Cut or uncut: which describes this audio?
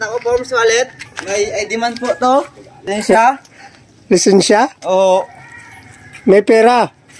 cut